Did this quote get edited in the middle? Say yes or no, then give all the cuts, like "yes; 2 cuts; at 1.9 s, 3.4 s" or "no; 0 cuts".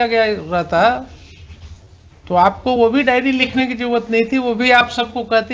no; 0 cuts